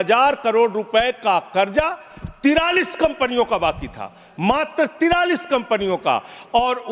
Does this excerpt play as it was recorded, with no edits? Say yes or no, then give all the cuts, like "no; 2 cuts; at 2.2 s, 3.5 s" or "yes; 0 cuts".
yes; 0 cuts